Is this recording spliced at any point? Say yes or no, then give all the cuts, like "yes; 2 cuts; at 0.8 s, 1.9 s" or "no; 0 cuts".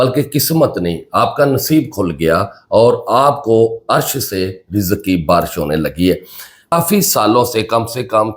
yes; 1 cut; at 6.7 s